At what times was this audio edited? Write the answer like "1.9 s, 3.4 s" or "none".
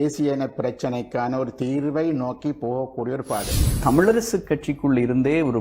3.7 s